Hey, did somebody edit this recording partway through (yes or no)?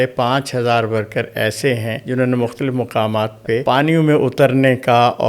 yes